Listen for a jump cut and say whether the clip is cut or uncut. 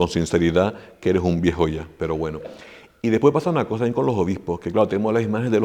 uncut